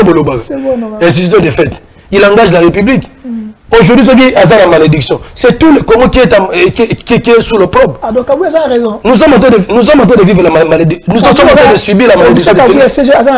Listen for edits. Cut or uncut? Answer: uncut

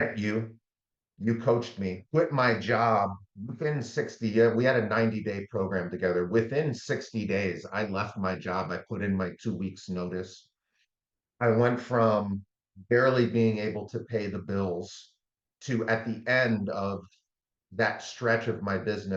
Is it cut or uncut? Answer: cut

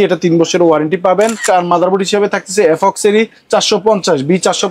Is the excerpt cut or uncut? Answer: cut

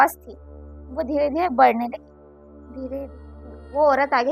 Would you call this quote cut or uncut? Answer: cut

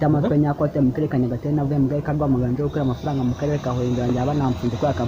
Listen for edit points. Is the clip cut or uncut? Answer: uncut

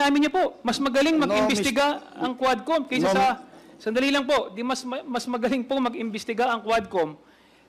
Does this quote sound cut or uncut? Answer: uncut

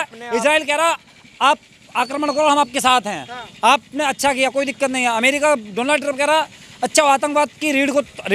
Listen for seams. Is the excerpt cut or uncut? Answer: uncut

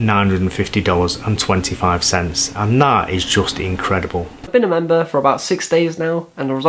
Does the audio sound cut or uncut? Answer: cut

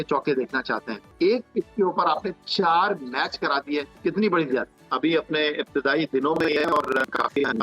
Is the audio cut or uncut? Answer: cut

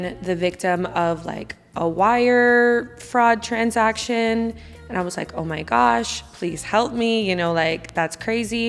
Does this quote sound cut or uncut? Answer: uncut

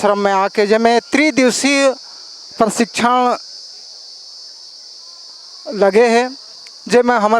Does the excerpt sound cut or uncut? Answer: uncut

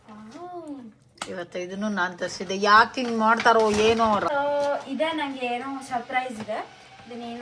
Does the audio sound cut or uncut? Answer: cut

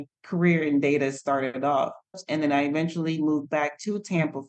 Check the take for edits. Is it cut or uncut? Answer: cut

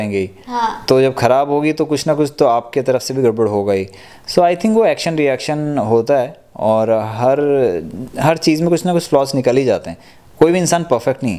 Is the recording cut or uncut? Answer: uncut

